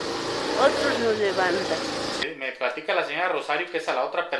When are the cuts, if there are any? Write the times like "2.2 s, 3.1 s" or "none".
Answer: 2.2 s